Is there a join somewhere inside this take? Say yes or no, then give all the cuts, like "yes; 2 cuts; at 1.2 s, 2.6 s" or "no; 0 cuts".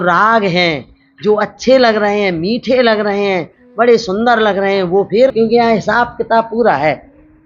yes; 1 cut; at 5.3 s